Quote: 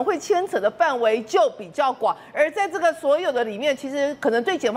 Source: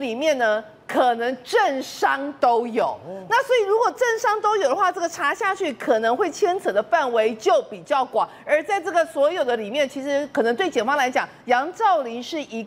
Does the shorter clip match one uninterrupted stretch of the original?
yes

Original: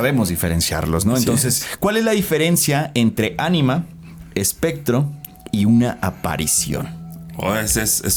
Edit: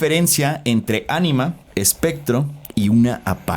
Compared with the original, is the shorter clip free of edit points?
no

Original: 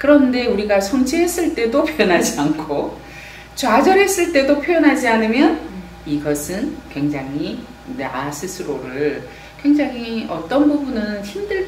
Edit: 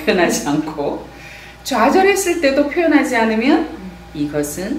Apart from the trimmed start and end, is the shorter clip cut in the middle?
no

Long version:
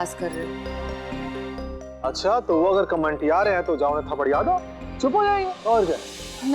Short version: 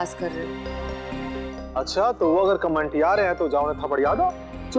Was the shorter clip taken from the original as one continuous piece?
no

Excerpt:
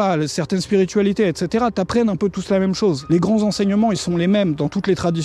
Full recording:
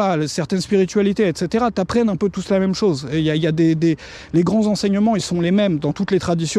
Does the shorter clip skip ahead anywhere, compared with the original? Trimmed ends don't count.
yes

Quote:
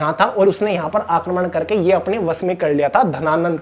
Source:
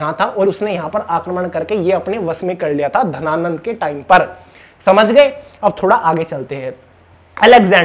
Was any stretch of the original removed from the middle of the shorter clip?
no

